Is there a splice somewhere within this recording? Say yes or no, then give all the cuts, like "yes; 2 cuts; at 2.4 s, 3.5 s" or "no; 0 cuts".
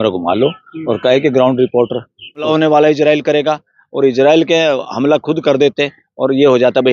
yes; 1 cut; at 2.4 s